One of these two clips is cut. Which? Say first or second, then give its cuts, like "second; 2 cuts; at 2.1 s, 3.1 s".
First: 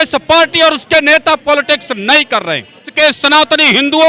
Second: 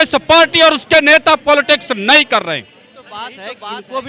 first; 1 cut; at 2.9 s